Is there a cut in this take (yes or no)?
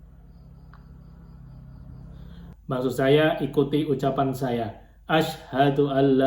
yes